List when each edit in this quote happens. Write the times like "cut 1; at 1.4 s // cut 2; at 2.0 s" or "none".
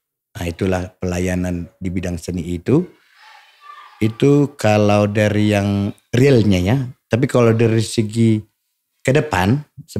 none